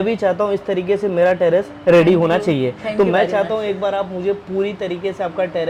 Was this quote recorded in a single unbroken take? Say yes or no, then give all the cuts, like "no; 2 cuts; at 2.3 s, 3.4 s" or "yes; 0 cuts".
yes; 0 cuts